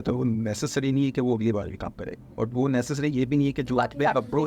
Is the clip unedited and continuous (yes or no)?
yes